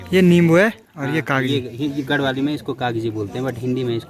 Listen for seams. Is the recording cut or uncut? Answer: uncut